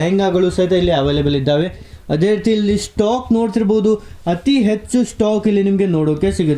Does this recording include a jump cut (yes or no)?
yes